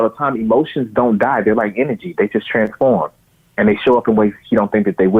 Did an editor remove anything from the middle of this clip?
no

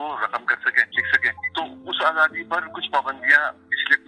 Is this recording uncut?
no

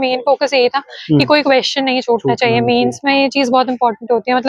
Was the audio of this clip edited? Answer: no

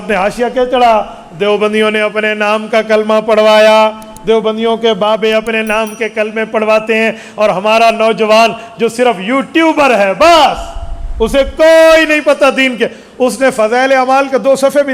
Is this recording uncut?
yes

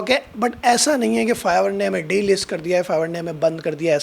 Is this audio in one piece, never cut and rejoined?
yes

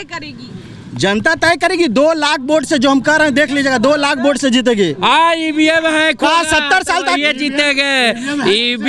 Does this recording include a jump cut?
no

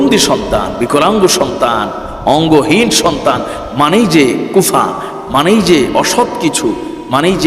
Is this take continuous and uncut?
yes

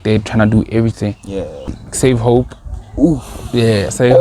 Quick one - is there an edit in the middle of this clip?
yes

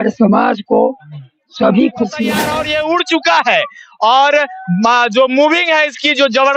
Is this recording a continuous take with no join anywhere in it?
no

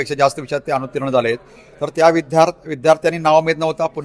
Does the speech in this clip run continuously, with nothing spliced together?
yes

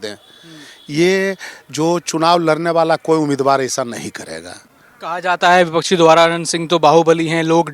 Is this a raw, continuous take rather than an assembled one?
yes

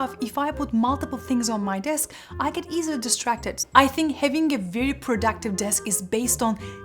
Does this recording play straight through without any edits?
no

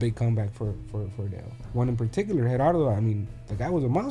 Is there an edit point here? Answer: yes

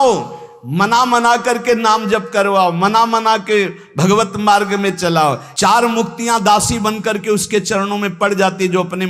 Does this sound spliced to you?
yes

